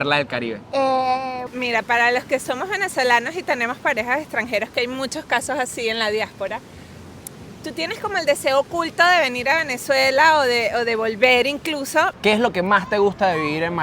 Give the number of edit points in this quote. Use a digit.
2